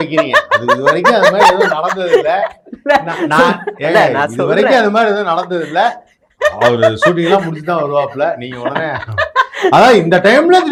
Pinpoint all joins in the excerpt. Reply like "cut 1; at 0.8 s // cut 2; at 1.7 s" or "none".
none